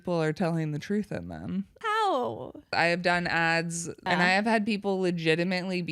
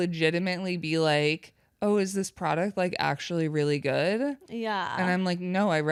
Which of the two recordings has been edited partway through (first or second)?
first